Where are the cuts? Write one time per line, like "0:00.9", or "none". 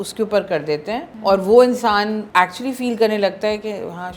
0:01.1
0:02.2